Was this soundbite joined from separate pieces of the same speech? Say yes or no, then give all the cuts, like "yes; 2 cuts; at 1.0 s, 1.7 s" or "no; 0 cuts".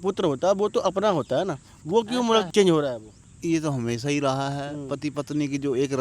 yes; 1 cut; at 2.5 s